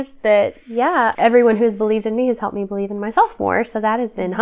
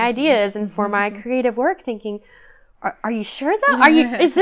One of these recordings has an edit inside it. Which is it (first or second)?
first